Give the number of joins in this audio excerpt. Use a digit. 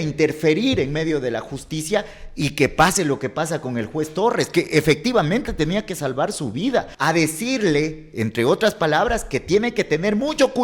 1